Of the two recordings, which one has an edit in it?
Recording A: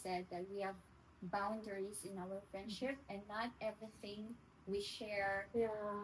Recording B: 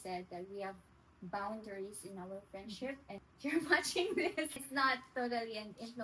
B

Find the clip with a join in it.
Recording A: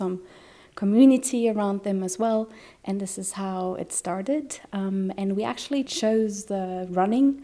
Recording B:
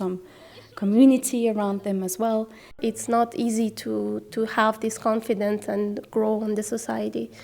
B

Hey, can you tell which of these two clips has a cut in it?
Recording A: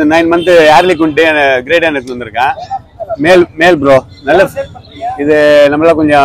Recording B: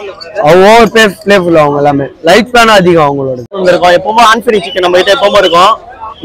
B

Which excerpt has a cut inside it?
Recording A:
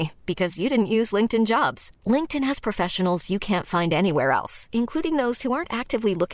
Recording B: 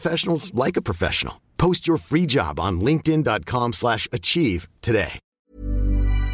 B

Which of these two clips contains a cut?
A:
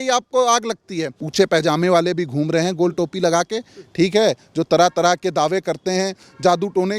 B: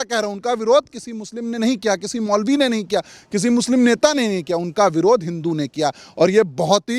A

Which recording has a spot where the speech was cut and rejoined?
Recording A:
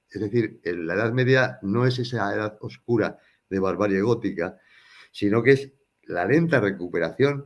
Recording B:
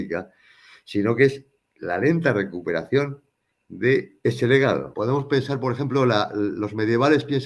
B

